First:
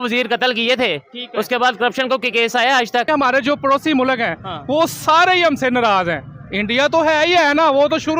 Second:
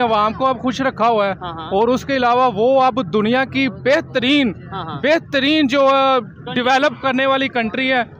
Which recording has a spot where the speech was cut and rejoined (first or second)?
first